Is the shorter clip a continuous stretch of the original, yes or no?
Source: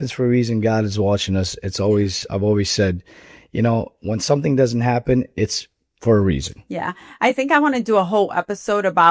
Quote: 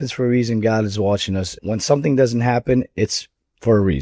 no